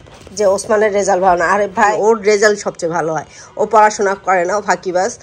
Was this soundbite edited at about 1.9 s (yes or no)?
yes